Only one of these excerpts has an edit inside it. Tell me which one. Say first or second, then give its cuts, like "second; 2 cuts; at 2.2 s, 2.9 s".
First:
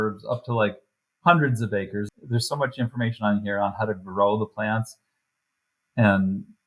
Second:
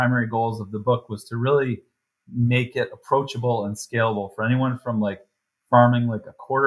first; 1 cut; at 2.0 s